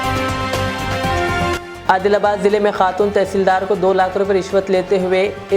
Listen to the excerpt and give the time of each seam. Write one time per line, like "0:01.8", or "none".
0:01.5